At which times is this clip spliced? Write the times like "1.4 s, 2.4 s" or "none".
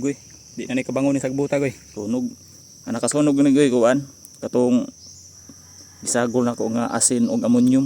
1.8 s